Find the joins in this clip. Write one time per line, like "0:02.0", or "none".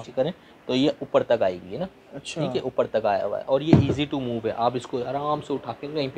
none

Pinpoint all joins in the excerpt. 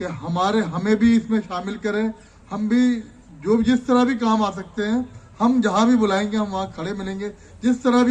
none

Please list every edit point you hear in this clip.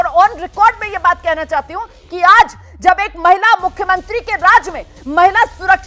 none

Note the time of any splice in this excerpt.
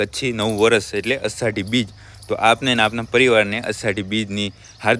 none

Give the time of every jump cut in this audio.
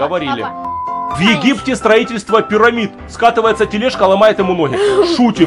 0:01.1

